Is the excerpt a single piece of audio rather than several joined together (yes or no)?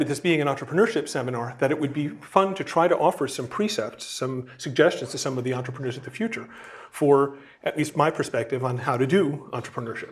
no